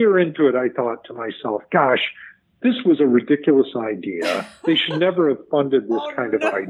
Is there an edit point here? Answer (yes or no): no